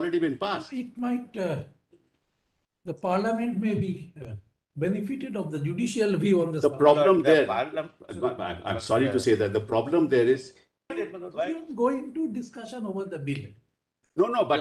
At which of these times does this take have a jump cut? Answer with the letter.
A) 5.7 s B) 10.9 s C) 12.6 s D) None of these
B